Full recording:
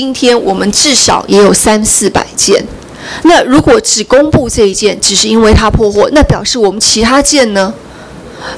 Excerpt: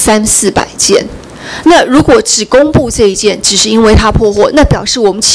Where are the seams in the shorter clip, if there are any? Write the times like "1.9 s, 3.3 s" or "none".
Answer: none